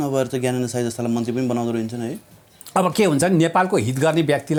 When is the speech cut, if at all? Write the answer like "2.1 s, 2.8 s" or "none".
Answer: none